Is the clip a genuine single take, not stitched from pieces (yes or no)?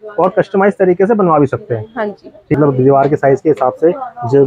no